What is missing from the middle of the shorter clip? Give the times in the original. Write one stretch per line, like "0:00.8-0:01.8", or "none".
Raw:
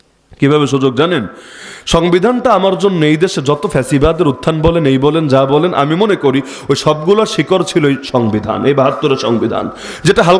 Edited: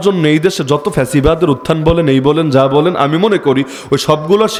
none